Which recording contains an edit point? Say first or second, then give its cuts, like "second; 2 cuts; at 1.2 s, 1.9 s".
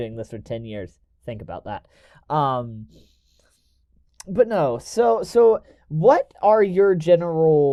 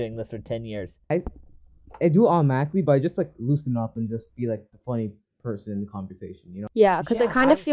second; 2 cuts; at 1.0 s, 6.6 s